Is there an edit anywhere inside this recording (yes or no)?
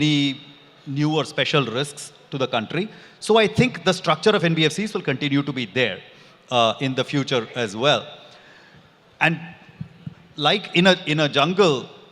no